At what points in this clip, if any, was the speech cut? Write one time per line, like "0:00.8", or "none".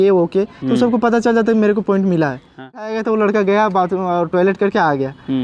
0:02.9

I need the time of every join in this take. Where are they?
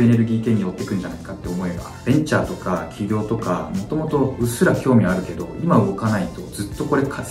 0:02.0

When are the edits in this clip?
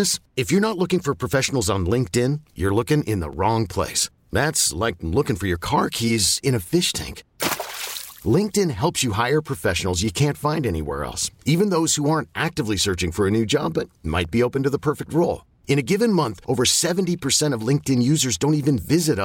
none

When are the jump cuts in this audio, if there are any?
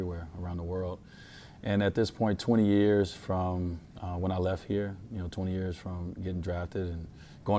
none

